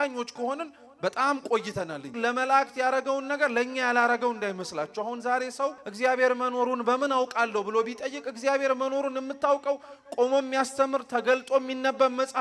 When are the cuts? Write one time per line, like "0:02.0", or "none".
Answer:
0:02.2
0:05.9